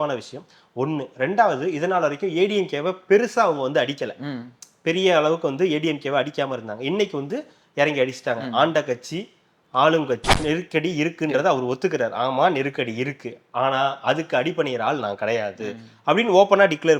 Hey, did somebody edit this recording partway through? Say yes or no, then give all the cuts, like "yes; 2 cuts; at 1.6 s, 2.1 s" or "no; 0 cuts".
yes; 1 cut; at 10.3 s